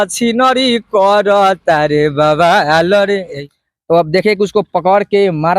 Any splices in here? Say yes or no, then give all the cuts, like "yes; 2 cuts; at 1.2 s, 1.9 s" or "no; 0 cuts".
yes; 1 cut; at 3.4 s